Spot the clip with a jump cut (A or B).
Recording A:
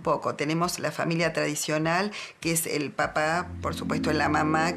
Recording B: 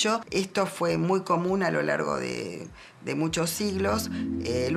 B